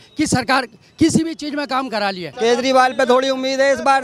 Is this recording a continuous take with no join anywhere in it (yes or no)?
no